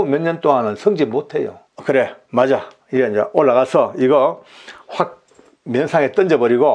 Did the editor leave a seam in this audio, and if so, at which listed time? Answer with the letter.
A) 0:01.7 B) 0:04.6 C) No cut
A